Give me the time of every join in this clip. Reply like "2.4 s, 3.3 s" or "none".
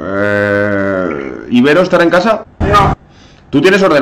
2.5 s